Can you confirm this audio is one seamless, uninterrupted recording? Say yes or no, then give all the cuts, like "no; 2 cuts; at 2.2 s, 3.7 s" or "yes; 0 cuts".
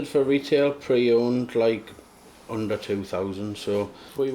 yes; 0 cuts